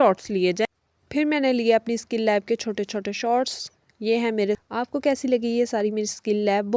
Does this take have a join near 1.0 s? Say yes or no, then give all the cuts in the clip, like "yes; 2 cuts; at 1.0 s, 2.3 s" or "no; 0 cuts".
no; 0 cuts